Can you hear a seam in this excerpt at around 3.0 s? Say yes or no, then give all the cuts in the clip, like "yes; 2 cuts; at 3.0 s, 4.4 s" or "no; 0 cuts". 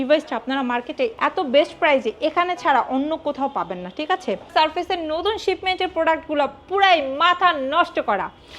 no; 2 cuts; at 1.2 s, 4.5 s